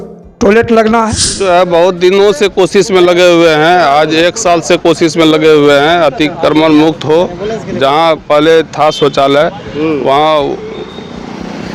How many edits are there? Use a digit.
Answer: 1